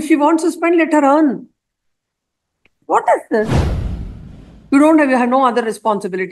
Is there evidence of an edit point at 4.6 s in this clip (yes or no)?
no